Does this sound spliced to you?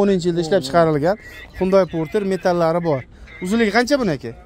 no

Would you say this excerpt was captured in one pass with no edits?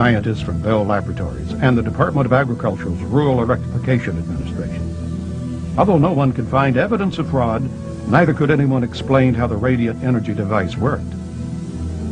no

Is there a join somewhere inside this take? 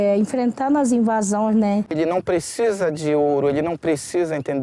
yes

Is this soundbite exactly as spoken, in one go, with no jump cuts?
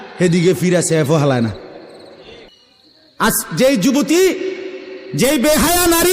no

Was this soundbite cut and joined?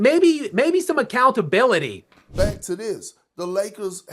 yes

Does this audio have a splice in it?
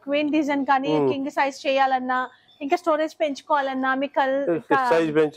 no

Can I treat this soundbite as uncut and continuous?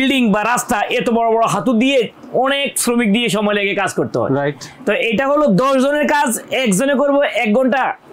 yes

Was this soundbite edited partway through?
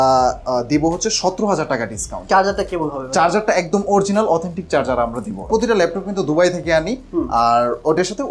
yes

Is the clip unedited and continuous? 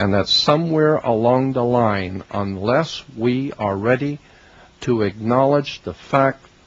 no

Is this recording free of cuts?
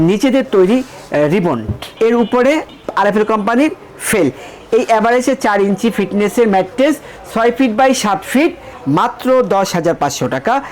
no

